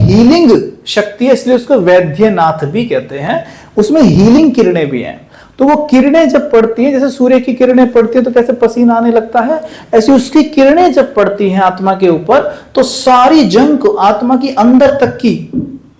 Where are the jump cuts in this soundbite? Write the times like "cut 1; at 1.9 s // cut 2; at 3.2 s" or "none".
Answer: none